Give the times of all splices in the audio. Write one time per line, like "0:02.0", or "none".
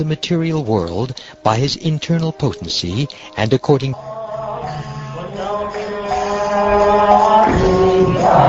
none

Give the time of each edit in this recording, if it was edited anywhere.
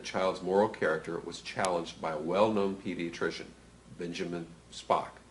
0:01.7

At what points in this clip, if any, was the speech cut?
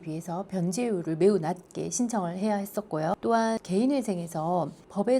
none

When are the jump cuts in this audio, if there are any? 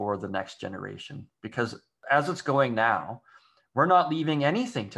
0:01.9

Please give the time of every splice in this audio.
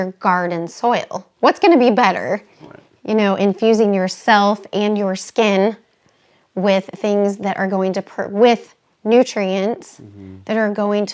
0:01.3

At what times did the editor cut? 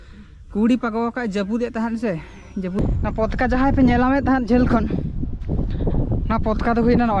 0:02.8

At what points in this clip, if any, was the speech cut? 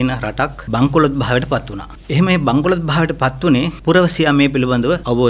none

